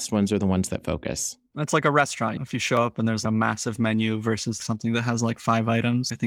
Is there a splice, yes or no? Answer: yes